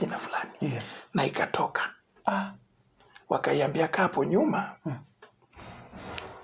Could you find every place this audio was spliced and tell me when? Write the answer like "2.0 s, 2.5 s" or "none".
none

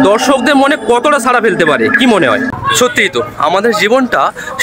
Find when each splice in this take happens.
2.5 s

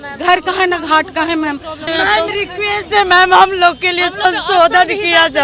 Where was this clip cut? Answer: 1.9 s

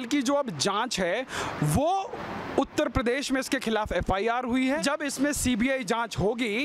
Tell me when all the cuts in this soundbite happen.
4.8 s

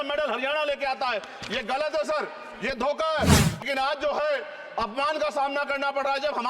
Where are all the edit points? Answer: 3.6 s

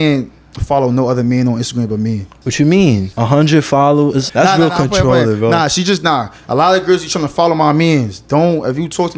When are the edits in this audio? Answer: 2.3 s, 3.1 s, 4.3 s

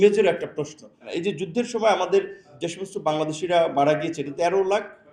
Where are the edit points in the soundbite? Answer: 1.1 s, 2.5 s, 4.3 s

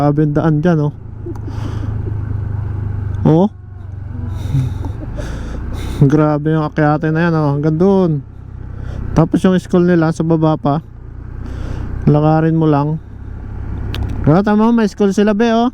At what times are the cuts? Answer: none

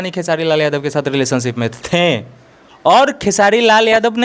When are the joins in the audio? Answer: none

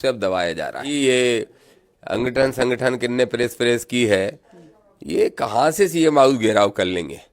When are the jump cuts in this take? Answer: 1.0 s

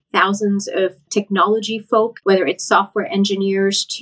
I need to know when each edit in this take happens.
1.0 s, 2.2 s

